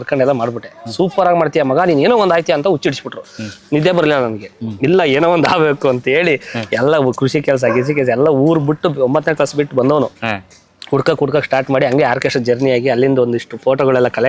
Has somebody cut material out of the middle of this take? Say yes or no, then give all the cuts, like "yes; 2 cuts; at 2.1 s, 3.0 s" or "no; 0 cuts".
no; 0 cuts